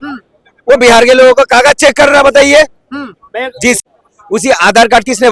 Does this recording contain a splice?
yes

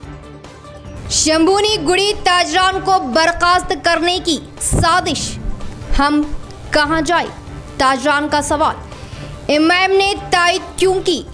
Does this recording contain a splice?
no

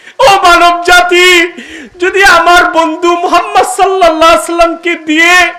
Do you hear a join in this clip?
no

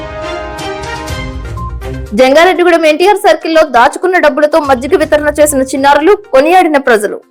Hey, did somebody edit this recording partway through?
no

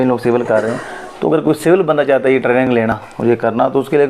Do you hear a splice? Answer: no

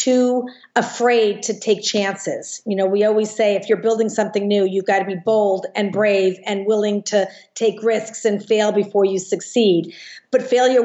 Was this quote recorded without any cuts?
yes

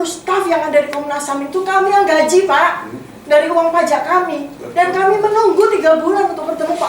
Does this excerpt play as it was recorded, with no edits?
yes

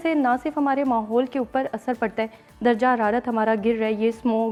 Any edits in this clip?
no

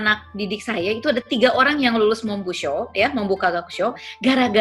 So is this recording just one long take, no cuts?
yes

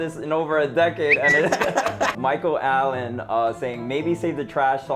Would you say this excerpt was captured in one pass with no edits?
no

